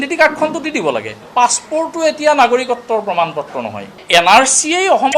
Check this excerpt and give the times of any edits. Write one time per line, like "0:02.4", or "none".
0:01.2
0:04.0